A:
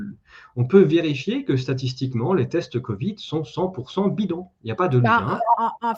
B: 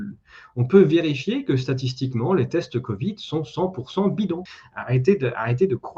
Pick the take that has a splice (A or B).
B